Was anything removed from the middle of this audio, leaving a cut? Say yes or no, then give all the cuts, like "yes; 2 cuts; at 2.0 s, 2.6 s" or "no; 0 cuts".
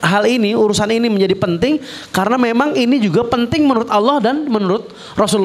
no; 0 cuts